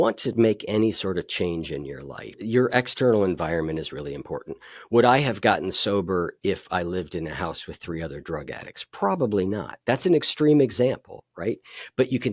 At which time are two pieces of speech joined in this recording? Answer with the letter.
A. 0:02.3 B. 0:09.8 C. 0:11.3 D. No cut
A